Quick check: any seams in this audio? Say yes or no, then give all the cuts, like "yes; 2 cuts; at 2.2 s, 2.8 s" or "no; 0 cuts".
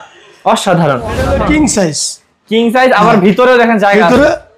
yes; 1 cut; at 1.2 s